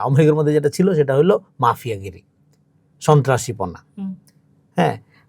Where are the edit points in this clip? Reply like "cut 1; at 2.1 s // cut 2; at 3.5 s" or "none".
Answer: none